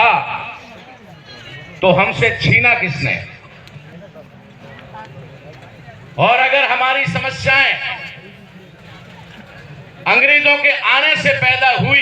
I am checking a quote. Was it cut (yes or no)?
yes